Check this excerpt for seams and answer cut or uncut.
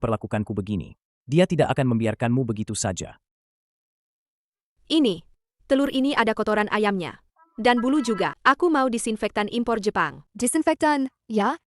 cut